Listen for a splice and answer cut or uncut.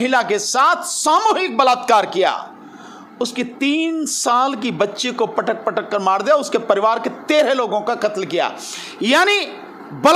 uncut